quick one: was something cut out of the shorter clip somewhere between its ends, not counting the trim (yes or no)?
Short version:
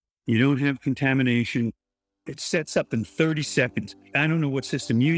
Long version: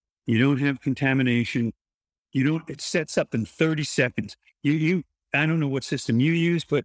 yes